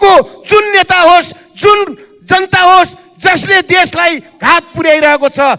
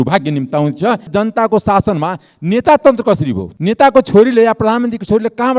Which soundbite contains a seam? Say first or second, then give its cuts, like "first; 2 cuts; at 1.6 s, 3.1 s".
second; 2 cuts; at 1.1 s, 3.5 s